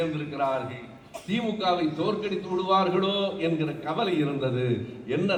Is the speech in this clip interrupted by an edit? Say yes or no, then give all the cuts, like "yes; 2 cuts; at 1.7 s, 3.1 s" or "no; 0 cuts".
no; 0 cuts